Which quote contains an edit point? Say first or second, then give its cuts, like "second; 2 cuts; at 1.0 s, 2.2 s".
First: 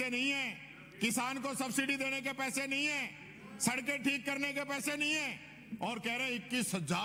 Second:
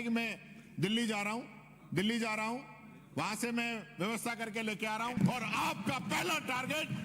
second; 1 cut; at 5.1 s